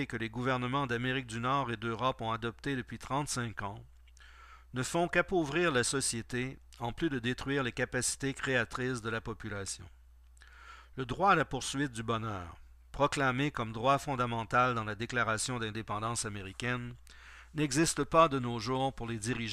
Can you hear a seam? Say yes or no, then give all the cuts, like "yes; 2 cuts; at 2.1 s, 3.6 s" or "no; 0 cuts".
no; 0 cuts